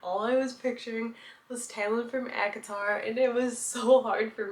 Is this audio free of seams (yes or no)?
yes